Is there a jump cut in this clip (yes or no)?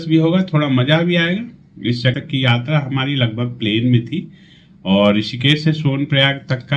yes